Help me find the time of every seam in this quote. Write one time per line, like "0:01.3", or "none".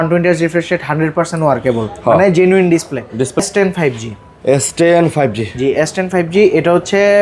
0:03.4